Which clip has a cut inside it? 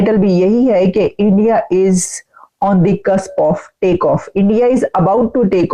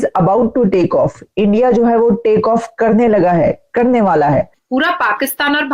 second; 1 cut; at 4.6 s

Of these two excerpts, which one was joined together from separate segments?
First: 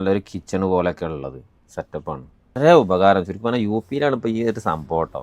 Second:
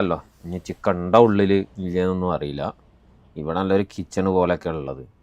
first; 1 cut; at 2.6 s

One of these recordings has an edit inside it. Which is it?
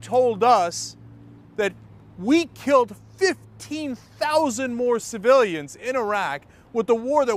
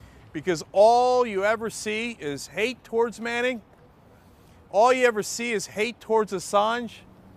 second; 1 cut; at 5.6 s

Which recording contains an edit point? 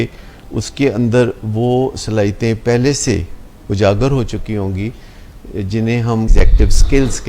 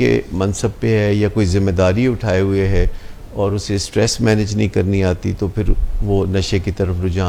first; 1 cut; at 6.3 s

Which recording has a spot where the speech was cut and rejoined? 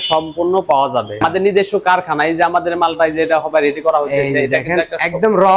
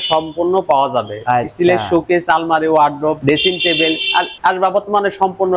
first; 1 cut; at 1.2 s

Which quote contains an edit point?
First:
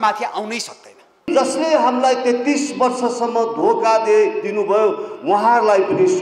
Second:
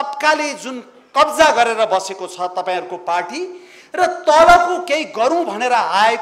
first; 1 cut; at 1.3 s

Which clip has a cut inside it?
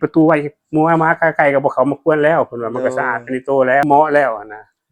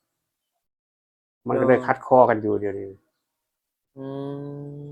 first; 1 cut; at 3.8 s

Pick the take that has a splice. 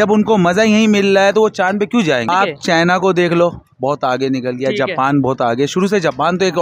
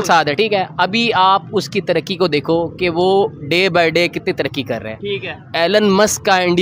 first; 1 cut; at 2.3 s

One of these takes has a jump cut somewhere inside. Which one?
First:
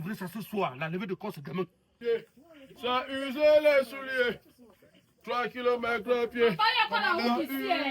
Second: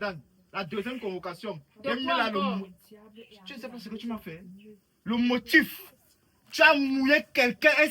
first; 1 cut; at 1.9 s

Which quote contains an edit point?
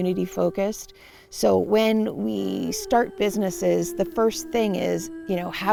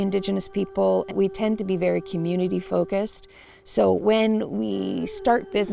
second; 1 cut; at 1.1 s

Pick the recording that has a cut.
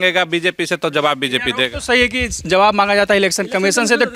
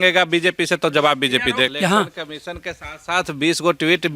second; 1 cut; at 1.7 s

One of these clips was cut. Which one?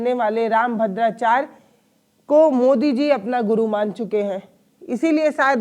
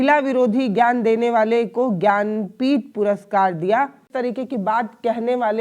second; 1 cut; at 4.1 s

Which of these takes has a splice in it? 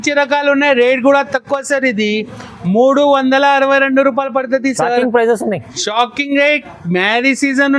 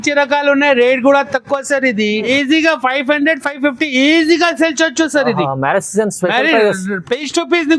second; 1 cut; at 2.3 s

